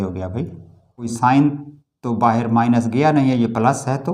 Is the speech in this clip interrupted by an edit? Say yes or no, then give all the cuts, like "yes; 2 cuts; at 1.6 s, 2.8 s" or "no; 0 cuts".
yes; 1 cut; at 1.1 s